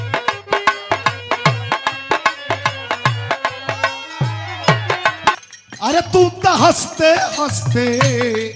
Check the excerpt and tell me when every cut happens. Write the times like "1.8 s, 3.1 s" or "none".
5.4 s